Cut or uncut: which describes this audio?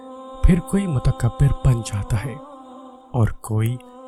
uncut